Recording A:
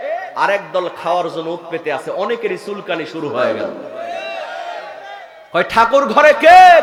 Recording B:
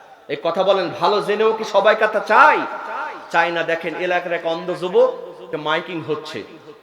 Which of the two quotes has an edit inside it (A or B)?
B